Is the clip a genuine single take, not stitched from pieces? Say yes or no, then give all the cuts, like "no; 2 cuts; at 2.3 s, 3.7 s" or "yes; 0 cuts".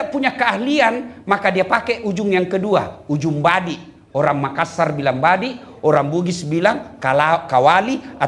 yes; 0 cuts